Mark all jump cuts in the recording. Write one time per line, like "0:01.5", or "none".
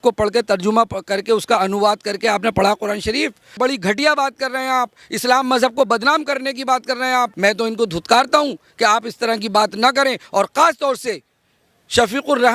0:03.6
0:07.3